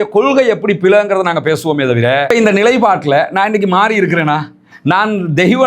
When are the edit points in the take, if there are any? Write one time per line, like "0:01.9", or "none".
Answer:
0:02.2